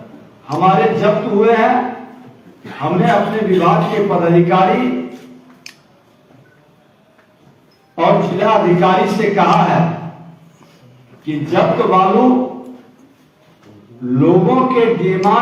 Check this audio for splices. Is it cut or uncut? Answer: uncut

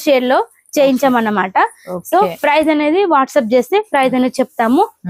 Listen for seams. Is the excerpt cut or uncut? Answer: uncut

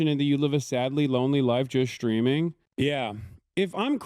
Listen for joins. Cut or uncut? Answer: cut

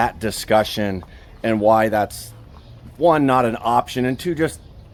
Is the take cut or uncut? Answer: uncut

